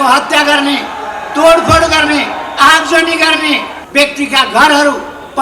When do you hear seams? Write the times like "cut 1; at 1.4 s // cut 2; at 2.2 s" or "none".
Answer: cut 1; at 3.8 s